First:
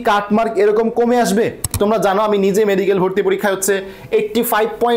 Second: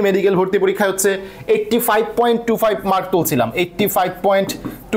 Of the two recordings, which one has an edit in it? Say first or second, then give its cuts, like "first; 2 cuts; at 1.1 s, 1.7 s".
first; 1 cut; at 1.7 s